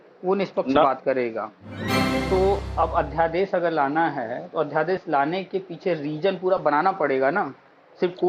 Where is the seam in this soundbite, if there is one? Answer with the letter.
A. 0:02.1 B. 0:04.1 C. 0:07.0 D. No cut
A